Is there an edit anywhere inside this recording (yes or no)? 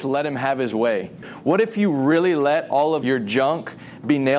yes